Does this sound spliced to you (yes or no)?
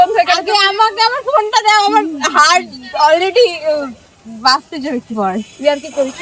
no